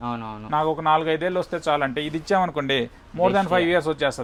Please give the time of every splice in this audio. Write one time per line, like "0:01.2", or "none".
none